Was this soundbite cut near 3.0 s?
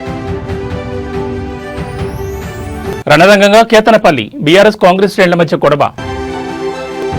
yes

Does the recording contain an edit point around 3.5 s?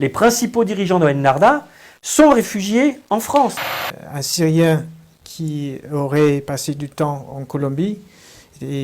yes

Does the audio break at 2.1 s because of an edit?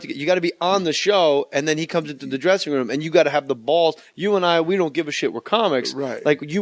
no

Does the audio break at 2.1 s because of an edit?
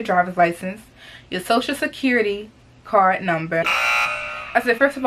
no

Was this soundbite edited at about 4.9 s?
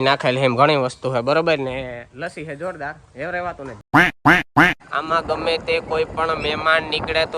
yes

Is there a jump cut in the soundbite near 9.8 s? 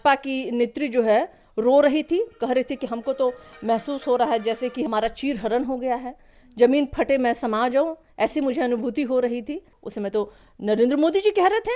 yes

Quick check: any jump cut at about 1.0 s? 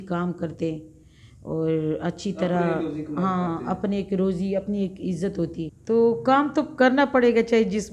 no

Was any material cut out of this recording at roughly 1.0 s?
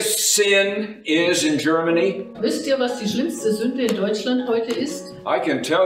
no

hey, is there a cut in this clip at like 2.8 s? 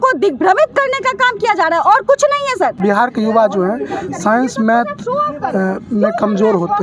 yes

